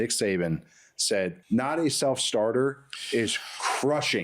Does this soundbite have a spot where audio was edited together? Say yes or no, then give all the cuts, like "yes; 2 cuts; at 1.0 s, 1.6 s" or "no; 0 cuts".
yes; 1 cut; at 1.4 s